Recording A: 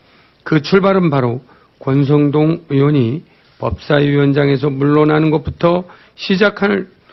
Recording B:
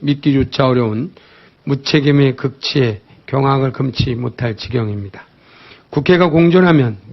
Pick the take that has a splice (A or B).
B